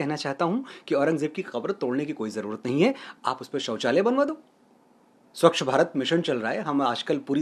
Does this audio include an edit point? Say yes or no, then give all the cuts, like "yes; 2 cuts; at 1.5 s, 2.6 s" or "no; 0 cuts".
no; 0 cuts